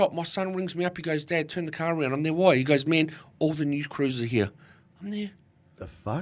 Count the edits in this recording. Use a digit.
0